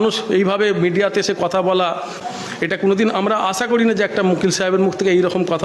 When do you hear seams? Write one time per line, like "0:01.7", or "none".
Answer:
0:02.1